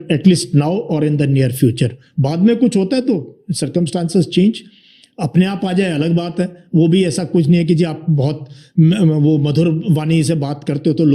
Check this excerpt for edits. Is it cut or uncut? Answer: uncut